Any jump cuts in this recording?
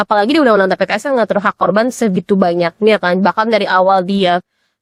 no; 0 cuts

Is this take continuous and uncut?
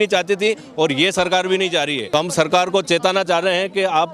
no; 1 cut; at 2.0 s

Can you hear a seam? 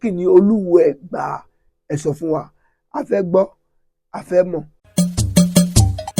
yes; 1 cut; at 4.8 s

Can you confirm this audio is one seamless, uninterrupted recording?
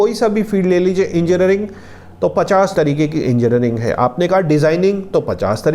no; 1 cut; at 2.7 s

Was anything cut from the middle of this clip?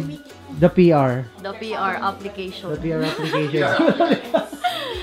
no; 0 cuts

